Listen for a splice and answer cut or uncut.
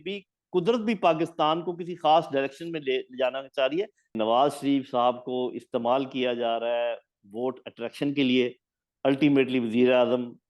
cut